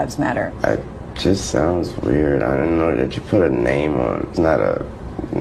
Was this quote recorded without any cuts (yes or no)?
no